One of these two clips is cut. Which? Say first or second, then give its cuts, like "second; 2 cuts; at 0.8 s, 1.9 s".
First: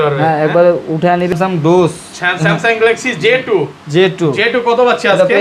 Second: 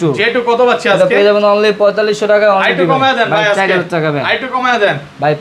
first; 1 cut; at 1.3 s